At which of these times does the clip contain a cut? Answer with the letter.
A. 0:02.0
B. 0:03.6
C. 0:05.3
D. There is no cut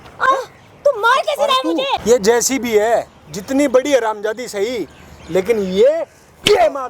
A